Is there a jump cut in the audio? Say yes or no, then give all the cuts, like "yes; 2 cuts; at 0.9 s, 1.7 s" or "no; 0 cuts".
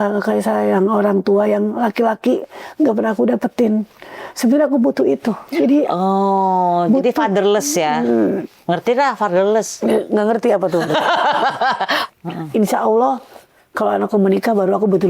yes; 1 cut; at 12.0 s